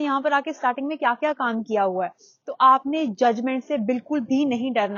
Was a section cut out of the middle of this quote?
no; 0 cuts

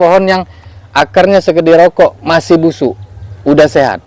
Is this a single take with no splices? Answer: yes; 0 cuts

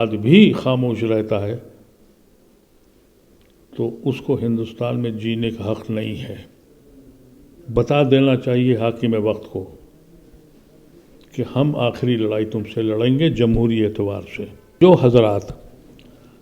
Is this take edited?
yes; 1 cut; at 14.8 s

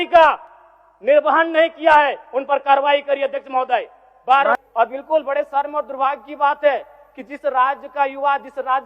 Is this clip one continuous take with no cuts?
no; 1 cut; at 4.6 s

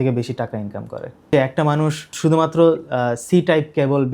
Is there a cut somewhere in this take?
yes; 2 cuts; at 1.2 s, 2.1 s

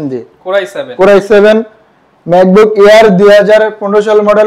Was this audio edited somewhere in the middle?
no; 0 cuts

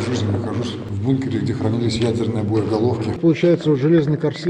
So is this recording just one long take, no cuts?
no; 2 cuts; at 0.9 s, 3.2 s

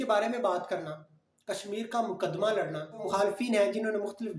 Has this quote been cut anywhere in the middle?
yes; 1 cut; at 3.0 s

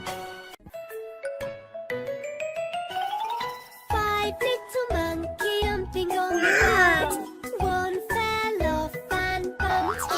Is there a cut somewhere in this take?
yes; 1 cut; at 5.6 s

